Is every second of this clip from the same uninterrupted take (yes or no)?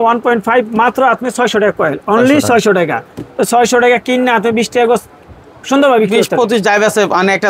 yes